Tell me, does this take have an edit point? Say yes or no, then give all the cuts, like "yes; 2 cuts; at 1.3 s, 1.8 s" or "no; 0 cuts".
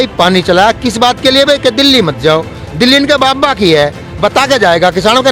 no; 0 cuts